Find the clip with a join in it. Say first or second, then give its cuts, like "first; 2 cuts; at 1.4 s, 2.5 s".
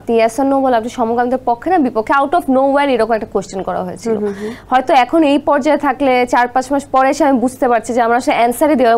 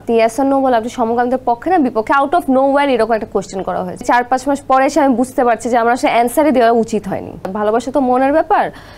second; 2 cuts; at 4.0 s, 7.5 s